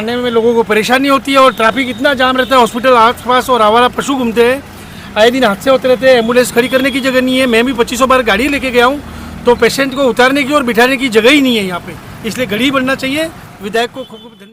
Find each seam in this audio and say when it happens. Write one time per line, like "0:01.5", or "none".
none